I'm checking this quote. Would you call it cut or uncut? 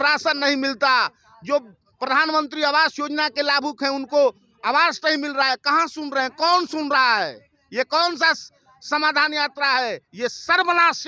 uncut